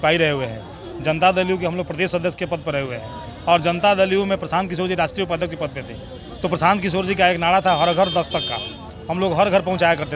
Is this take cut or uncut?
uncut